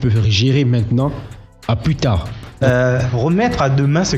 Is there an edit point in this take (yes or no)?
yes